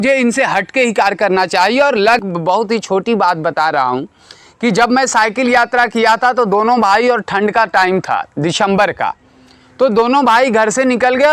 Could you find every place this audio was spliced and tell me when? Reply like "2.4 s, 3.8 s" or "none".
2.2 s